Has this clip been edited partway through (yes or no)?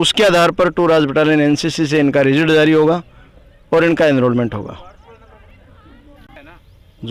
no